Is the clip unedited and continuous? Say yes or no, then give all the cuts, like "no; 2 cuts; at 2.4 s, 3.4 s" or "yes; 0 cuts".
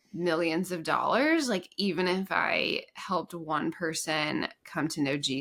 yes; 0 cuts